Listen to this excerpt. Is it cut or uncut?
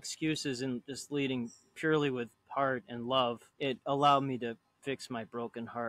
cut